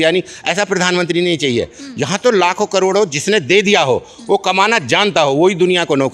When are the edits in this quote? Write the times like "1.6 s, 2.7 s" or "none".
none